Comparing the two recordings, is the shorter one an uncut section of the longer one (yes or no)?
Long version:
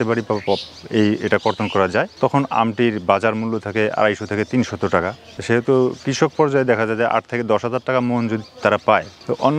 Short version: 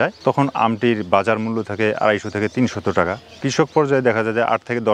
no